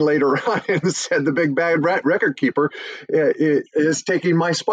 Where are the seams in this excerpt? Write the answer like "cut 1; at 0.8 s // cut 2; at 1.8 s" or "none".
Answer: none

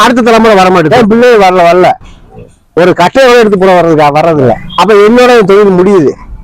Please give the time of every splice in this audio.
cut 1; at 0.9 s // cut 2; at 4.6 s

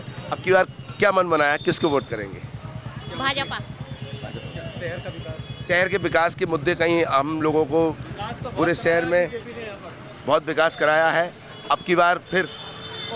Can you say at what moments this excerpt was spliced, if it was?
none

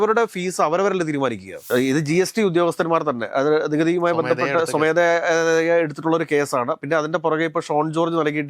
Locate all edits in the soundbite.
cut 1; at 1.6 s

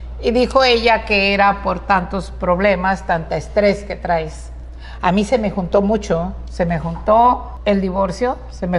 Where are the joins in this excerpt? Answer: cut 1; at 7.5 s

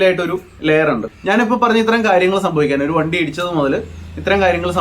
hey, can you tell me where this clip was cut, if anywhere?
cut 1; at 1.1 s

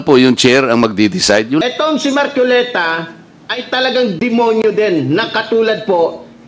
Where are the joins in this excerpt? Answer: cut 1; at 1.6 s

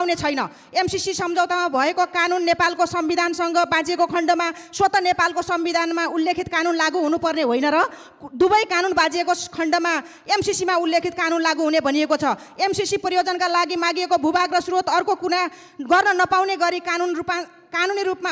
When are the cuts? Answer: none

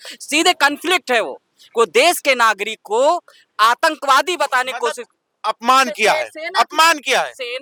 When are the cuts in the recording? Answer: none

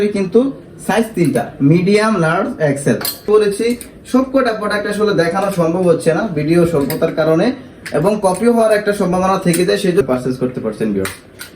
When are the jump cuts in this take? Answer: cut 1; at 3.3 s // cut 2; at 10.0 s

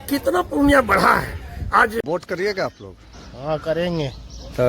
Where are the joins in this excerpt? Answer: cut 1; at 2.0 s

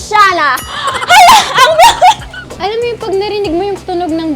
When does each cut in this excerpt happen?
cut 1; at 2.5 s

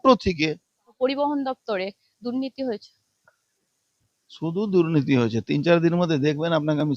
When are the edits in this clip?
cut 1; at 0.9 s

